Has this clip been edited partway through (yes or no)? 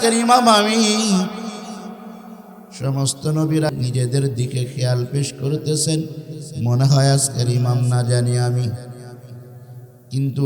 yes